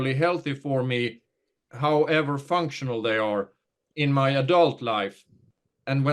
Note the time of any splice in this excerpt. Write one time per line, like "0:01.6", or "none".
0:01.7
0:03.8